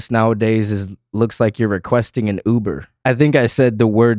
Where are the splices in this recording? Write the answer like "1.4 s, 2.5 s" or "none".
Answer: 2.9 s